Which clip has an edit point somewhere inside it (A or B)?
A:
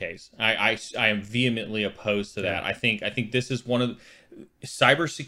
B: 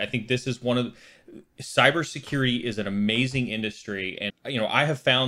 B